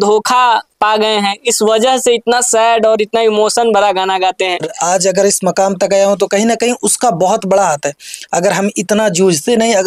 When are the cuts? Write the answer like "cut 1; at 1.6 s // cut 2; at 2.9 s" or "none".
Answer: cut 1; at 4.7 s